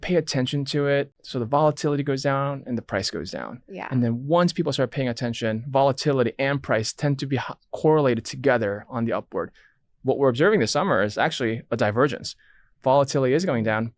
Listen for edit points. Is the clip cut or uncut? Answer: cut